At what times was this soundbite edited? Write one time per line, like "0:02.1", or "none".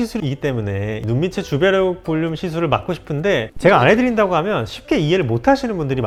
none